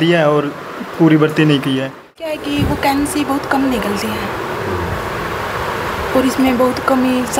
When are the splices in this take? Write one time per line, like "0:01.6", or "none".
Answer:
0:02.3